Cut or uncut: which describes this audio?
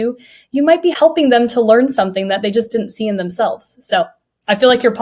cut